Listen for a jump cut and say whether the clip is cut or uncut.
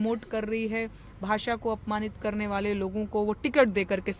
uncut